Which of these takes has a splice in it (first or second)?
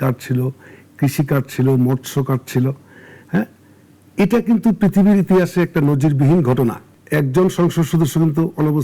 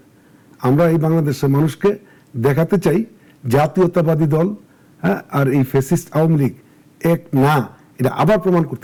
first